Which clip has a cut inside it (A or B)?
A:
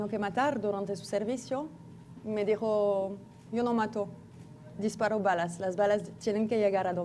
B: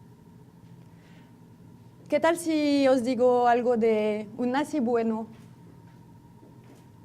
B